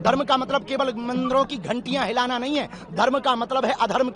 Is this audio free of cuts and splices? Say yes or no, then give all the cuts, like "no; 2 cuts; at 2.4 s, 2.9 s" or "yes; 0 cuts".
yes; 0 cuts